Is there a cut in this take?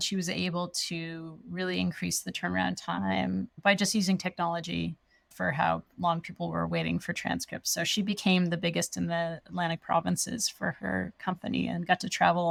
no; 0 cuts

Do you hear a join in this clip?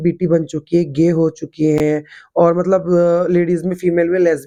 no; 0 cuts

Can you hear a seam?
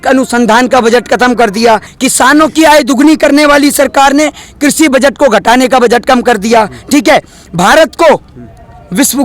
no; 0 cuts

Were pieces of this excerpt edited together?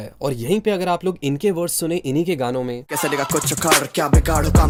no; 0 cuts

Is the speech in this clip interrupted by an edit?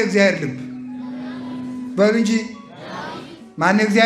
no; 0 cuts

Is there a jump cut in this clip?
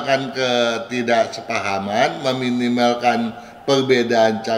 no; 0 cuts

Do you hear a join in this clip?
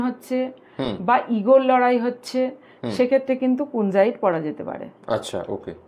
no; 0 cuts

